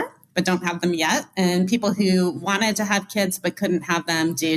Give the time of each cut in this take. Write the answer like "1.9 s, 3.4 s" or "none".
none